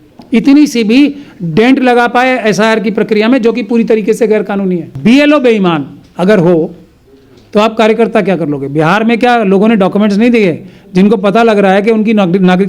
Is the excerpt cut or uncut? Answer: cut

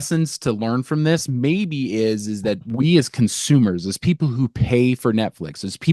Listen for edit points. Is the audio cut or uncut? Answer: uncut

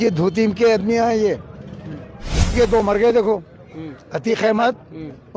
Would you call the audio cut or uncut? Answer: cut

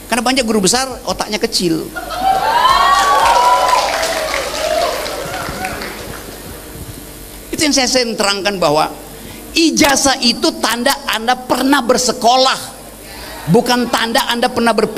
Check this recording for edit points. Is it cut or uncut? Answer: uncut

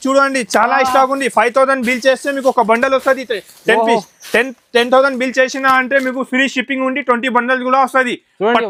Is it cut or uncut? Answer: uncut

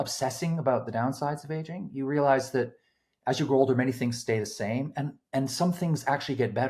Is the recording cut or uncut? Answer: uncut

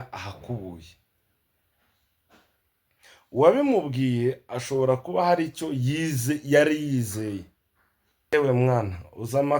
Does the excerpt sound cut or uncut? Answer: cut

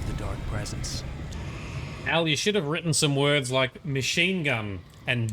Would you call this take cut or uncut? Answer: cut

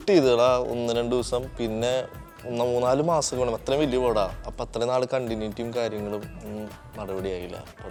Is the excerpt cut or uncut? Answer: uncut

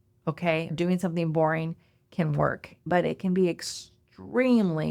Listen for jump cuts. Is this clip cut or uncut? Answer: cut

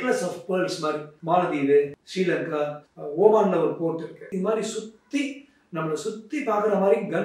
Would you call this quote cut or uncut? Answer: cut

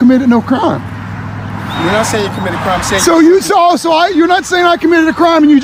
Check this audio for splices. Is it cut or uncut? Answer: uncut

